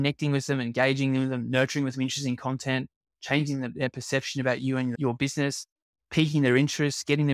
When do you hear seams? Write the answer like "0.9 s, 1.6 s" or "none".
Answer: 4.9 s